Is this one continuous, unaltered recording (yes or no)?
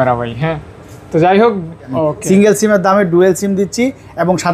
no